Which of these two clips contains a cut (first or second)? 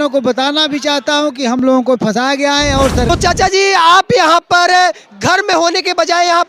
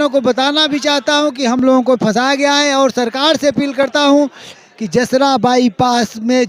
first